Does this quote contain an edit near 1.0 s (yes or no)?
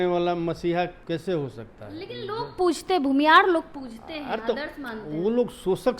yes